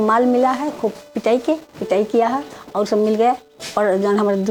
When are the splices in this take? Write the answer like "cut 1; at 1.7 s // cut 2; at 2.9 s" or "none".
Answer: none